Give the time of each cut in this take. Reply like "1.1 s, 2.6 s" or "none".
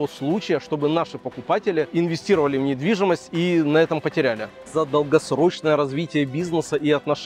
1.9 s, 4.7 s